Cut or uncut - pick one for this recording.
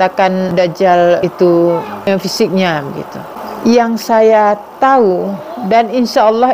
cut